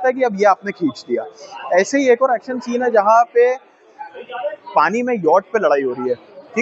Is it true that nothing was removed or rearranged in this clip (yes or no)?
yes